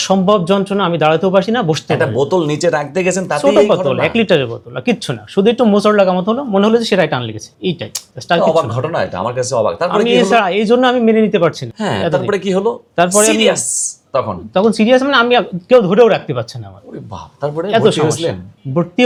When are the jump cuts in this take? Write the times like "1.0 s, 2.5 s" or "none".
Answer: none